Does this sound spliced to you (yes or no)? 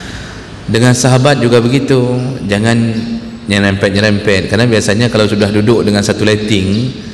no